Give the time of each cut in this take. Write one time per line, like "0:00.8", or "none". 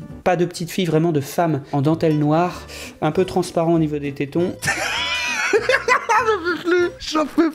none